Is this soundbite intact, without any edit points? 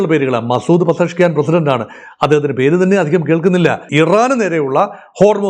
no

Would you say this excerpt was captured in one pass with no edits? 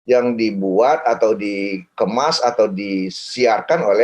yes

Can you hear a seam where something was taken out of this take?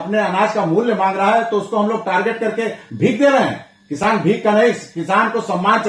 no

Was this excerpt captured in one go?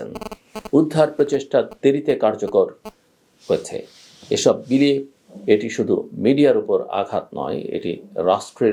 yes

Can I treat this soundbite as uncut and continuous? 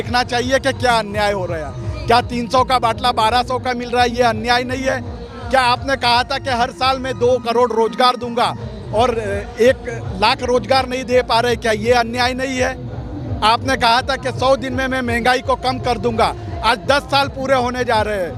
yes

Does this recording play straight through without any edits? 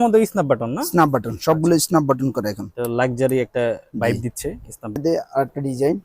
no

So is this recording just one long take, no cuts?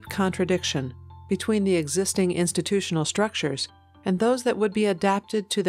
yes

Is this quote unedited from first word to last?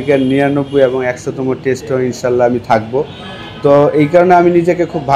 yes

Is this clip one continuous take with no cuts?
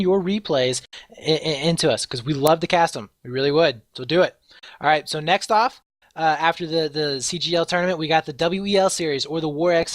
no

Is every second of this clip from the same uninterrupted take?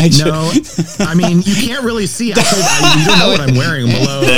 yes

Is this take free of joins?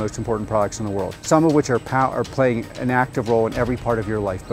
no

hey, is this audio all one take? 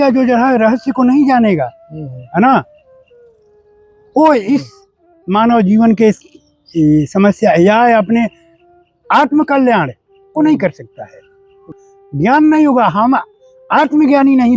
no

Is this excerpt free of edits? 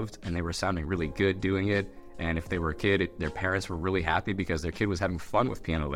yes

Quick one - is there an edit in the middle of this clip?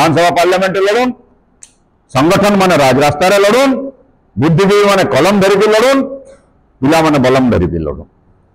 no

